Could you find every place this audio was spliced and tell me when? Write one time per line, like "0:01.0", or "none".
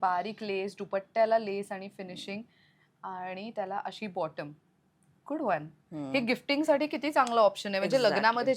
none